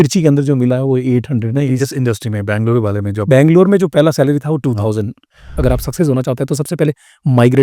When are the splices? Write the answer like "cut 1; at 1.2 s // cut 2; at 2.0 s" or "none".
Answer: cut 1; at 5.4 s